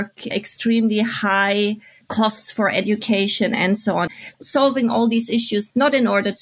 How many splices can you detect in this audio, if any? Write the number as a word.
one